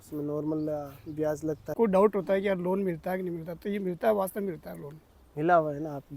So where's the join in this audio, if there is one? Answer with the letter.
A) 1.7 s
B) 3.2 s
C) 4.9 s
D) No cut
A